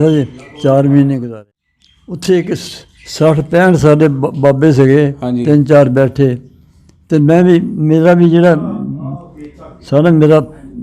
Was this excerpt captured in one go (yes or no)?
no